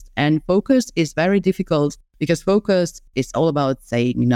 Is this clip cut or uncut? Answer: cut